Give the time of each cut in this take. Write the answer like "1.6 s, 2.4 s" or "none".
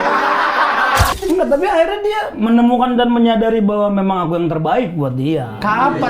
1.1 s